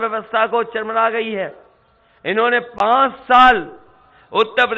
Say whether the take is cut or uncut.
uncut